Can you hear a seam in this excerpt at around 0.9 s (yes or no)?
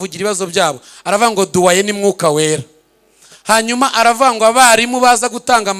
no